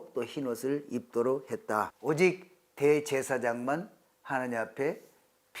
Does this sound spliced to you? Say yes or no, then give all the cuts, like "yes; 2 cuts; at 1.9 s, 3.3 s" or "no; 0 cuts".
yes; 1 cut; at 1.9 s